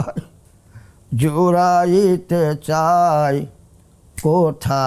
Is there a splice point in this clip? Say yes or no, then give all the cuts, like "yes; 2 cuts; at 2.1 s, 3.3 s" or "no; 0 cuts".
no; 0 cuts